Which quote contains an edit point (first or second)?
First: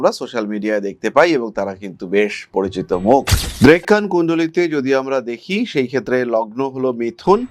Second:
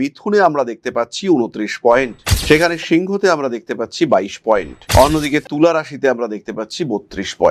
first